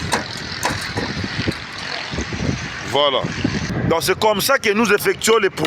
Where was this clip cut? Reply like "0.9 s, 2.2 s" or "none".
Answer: 3.7 s